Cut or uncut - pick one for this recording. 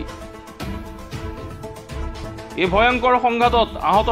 uncut